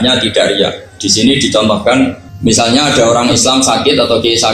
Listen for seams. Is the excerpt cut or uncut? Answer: cut